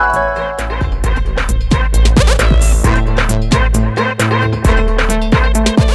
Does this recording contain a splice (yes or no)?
no